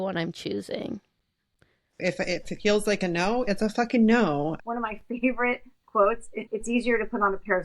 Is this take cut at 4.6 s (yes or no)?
yes